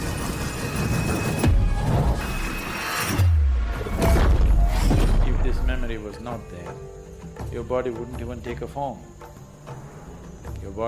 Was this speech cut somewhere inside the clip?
yes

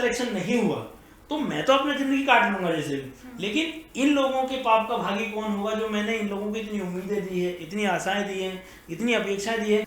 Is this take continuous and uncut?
yes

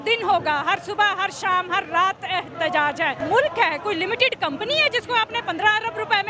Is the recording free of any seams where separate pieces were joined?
no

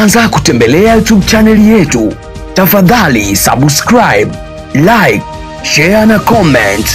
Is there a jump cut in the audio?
no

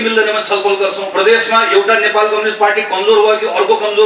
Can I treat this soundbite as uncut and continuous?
no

